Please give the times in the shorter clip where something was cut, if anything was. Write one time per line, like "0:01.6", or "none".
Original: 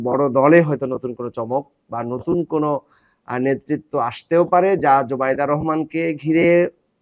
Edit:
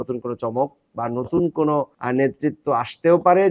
0:02.0